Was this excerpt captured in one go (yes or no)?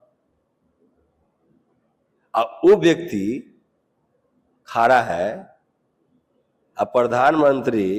yes